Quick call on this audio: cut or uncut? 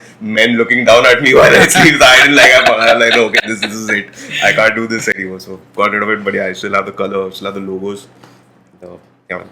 uncut